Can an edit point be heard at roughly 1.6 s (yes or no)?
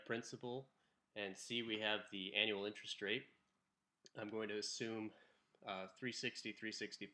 yes